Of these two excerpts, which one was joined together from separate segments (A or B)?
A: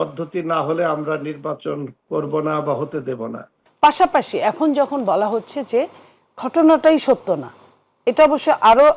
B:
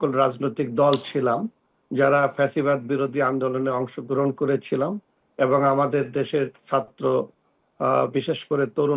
A